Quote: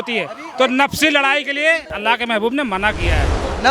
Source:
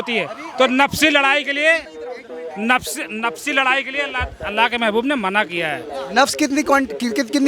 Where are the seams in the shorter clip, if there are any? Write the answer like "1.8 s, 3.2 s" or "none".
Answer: 1.9 s